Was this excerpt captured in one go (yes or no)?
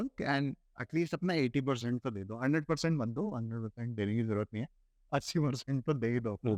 yes